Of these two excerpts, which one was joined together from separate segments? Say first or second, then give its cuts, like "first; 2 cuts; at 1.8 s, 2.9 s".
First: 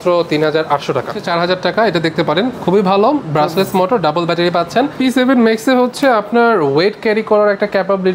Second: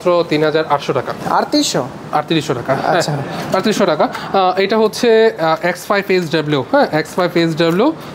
first; 2 cuts; at 1.2 s, 4.9 s